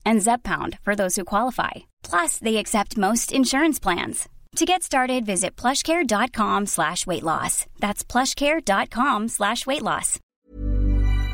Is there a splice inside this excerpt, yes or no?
yes